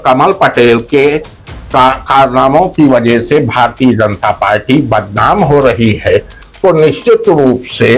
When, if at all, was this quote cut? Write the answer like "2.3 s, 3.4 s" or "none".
none